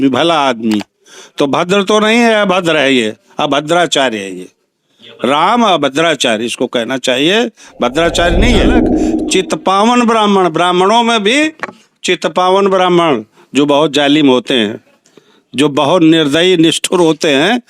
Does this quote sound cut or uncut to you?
cut